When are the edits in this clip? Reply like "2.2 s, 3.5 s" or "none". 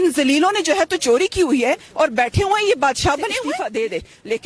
3.4 s